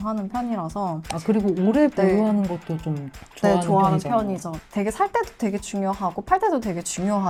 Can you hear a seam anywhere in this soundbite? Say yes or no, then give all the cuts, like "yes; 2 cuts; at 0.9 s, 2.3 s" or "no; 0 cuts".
no; 0 cuts